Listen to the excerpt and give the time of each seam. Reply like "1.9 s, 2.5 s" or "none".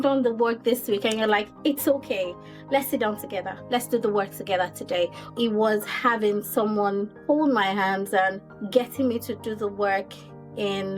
5.3 s, 7.1 s, 8.5 s